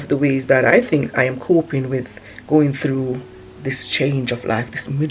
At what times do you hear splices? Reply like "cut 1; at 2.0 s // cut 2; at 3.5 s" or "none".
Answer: none